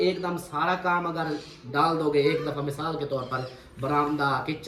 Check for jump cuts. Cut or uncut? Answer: uncut